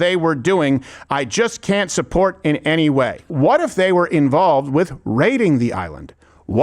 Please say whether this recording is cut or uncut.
cut